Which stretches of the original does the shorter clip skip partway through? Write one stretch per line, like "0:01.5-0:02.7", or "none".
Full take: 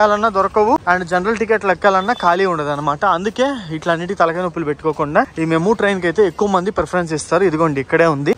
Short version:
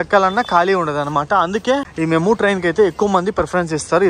0:03.6-0:05.3